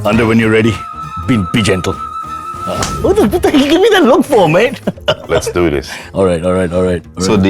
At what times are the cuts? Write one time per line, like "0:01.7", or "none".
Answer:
none